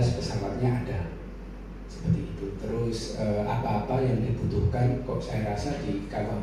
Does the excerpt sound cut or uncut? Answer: uncut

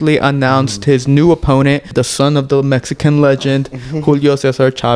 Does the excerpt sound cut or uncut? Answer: cut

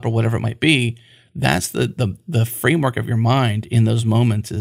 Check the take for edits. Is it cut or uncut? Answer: uncut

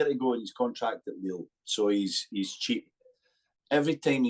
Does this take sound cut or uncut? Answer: cut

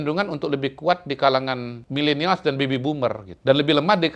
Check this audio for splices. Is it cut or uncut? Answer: cut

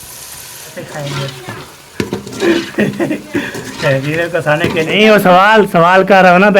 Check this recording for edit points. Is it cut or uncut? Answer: cut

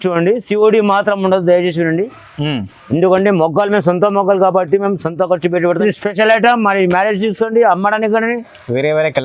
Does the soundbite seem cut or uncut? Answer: cut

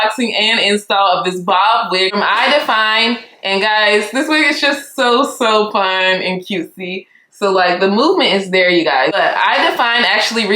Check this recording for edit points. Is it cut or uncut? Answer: cut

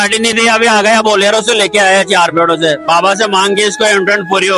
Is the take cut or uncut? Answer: uncut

